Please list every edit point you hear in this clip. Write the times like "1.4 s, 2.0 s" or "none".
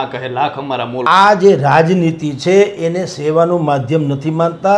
1.0 s

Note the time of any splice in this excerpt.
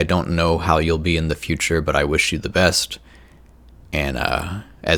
none

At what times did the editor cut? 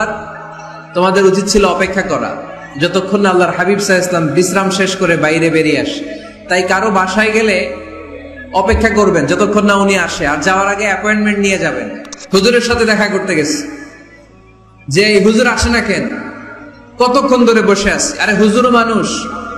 12.1 s

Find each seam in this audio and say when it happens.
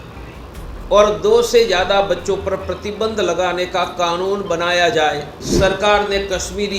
5.4 s

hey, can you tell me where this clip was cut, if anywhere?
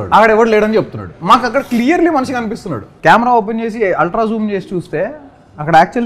2.9 s

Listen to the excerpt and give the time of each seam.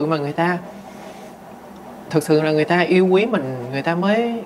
none

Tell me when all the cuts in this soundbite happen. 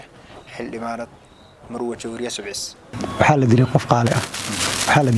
3.0 s

